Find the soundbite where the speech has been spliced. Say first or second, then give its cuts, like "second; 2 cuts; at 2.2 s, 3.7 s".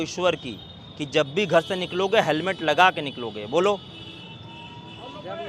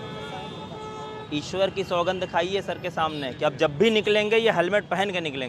second; 1 cut; at 1.2 s